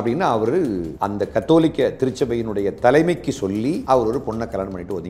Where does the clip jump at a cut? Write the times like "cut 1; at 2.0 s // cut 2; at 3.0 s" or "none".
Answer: cut 1; at 0.9 s // cut 2; at 3.8 s